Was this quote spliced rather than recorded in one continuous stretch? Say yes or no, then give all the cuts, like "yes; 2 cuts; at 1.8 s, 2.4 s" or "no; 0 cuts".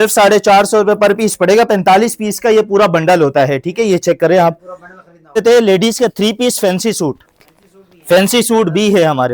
yes; 1 cut; at 5.4 s